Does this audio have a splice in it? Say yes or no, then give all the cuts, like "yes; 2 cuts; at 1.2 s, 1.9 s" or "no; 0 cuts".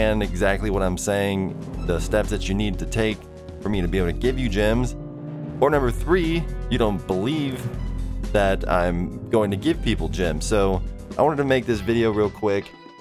yes; 1 cut; at 4.2 s